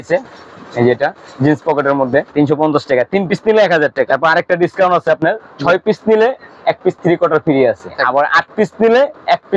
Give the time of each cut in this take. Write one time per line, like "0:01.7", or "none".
0:02.3
0:04.1
0:07.9